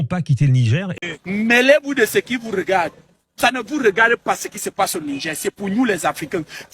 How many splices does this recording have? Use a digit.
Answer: 1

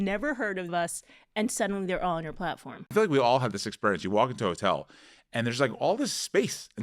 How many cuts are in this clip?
1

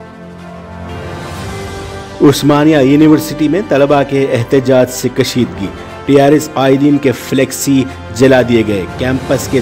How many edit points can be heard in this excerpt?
1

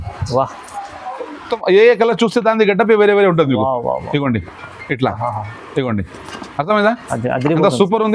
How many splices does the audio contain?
1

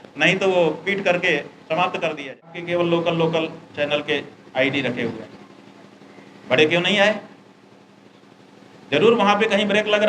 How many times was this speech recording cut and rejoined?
1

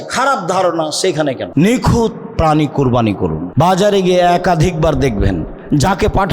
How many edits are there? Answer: 2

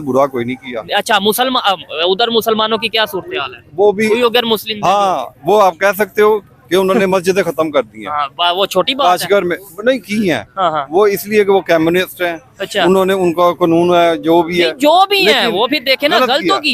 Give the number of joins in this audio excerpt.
0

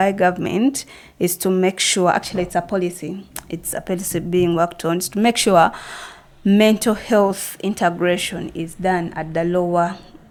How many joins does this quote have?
0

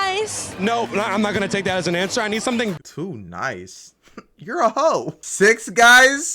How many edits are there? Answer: 2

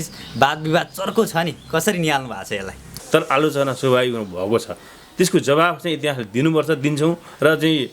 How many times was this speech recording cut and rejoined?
1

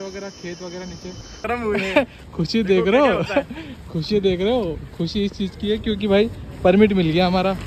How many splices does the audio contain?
1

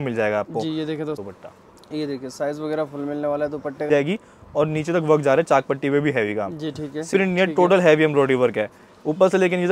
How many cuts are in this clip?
3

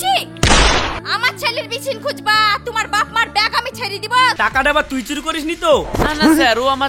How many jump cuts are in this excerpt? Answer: 1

